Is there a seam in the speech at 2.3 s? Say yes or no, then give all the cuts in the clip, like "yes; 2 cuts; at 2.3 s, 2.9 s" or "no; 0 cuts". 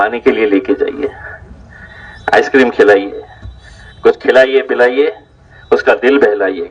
no; 0 cuts